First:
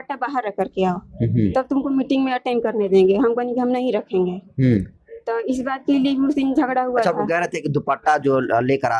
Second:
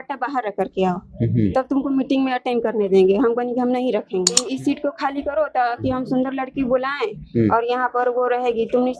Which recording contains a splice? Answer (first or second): second